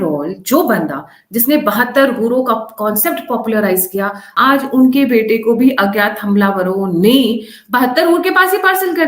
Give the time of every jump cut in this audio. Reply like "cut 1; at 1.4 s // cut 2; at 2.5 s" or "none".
cut 1; at 4.2 s

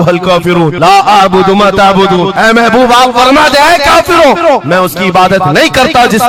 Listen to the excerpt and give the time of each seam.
none

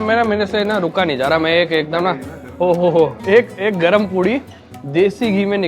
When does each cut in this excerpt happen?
cut 1; at 3.2 s

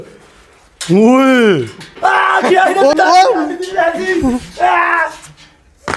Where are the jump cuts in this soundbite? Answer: cut 1; at 1.9 s // cut 2; at 2.9 s

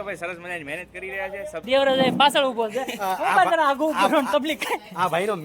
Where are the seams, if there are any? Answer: cut 1; at 1.6 s

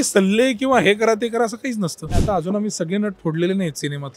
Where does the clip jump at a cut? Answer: cut 1; at 2.2 s

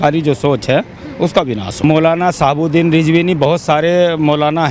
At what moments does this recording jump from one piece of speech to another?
cut 1; at 1.8 s

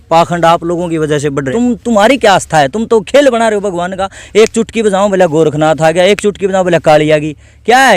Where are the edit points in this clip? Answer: cut 1; at 1.4 s

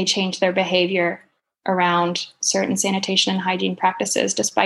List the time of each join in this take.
none

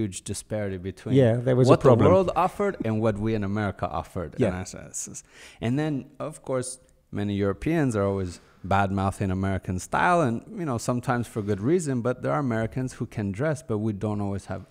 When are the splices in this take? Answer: none

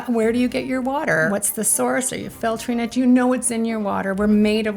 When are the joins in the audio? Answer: cut 1; at 1.3 s

